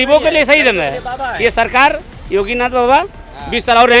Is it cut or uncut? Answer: uncut